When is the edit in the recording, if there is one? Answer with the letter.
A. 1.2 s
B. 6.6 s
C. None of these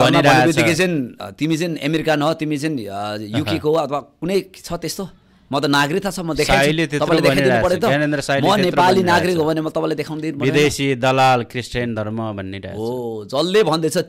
A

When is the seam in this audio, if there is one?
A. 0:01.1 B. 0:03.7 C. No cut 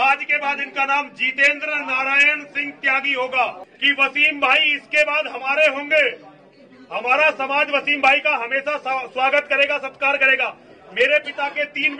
B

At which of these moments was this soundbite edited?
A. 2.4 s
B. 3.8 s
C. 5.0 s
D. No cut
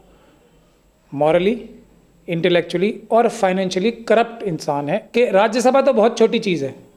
C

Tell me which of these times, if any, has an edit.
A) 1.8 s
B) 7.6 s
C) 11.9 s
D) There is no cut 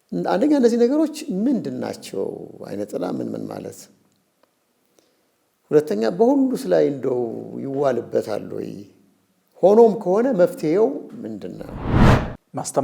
C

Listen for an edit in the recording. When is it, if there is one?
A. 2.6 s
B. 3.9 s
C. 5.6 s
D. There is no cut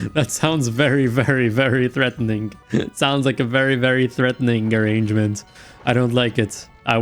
A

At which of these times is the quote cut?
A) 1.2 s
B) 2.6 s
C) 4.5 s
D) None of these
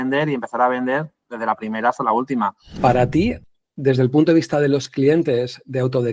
B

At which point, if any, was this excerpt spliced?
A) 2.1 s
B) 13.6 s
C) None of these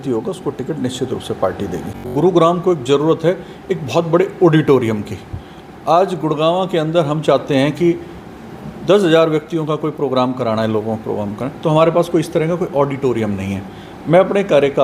A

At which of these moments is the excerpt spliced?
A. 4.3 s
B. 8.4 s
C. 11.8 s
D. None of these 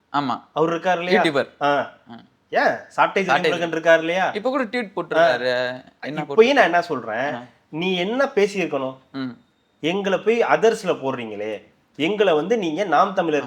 D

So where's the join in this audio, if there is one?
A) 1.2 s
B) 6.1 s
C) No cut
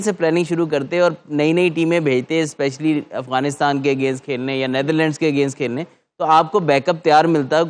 C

